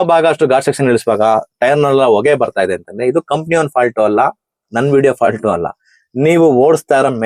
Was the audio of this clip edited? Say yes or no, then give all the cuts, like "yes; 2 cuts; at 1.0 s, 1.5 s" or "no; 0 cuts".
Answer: no; 0 cuts